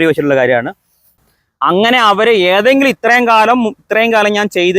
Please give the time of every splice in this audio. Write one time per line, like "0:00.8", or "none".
0:01.2